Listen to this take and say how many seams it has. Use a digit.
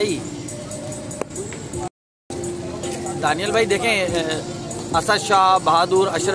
0